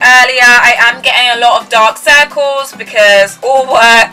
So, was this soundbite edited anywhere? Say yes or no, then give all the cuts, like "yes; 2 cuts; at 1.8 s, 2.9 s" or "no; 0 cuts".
no; 0 cuts